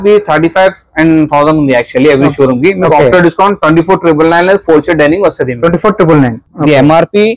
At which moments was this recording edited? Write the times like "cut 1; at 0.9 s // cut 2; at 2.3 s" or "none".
cut 1; at 6.5 s